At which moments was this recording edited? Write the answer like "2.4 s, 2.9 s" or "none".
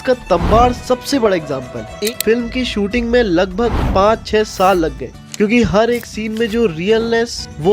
1.9 s, 5.1 s